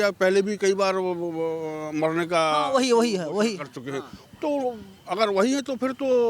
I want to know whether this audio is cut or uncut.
uncut